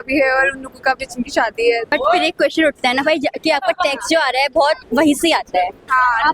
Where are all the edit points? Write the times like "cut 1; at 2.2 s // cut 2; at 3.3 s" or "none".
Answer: cut 1; at 1.9 s